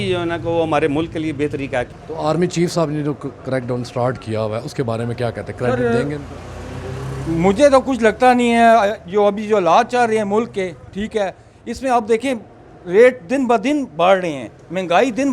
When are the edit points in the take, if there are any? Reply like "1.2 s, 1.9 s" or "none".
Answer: 1.9 s